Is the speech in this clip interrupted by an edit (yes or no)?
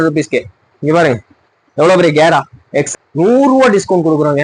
yes